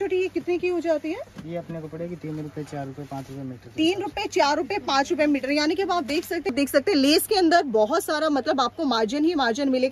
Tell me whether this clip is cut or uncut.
cut